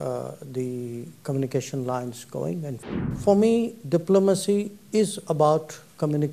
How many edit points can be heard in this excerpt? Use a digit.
1